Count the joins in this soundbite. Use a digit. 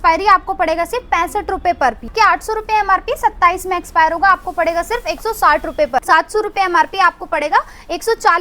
2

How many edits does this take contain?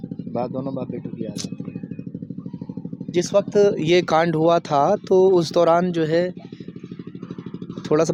0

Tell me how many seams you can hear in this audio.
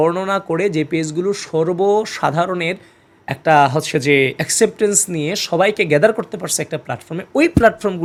0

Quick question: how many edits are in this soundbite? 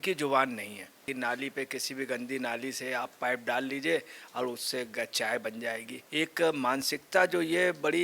2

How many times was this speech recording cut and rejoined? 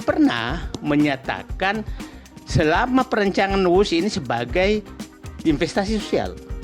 0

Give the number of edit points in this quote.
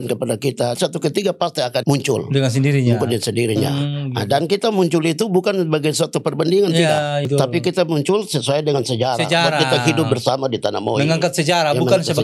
3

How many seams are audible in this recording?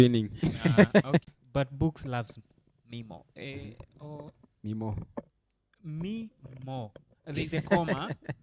1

